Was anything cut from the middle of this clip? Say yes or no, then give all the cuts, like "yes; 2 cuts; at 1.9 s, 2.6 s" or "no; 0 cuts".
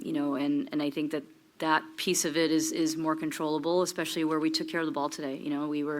no; 0 cuts